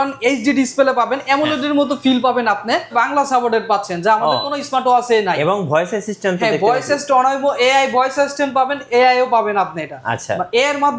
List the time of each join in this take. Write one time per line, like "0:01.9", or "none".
0:02.9